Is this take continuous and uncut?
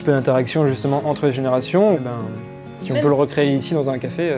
yes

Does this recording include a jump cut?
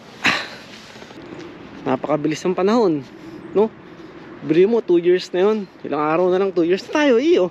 yes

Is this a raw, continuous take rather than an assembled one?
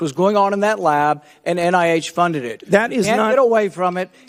yes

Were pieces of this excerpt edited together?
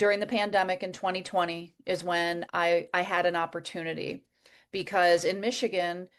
no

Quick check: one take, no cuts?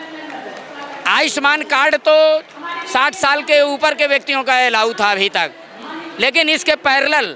yes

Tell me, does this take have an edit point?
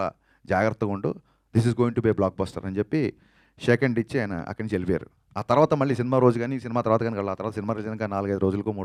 no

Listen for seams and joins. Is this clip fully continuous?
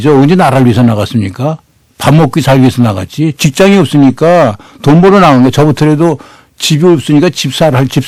yes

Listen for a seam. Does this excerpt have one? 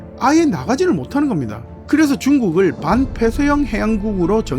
yes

